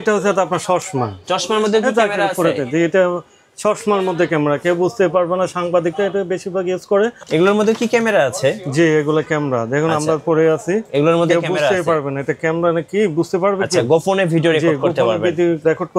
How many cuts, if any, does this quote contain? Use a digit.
1